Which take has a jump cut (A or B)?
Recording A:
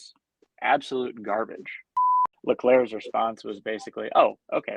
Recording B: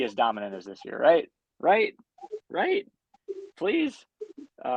A